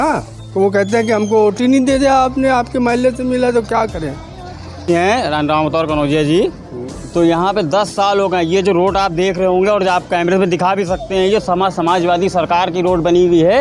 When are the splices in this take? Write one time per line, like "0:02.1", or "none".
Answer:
0:04.9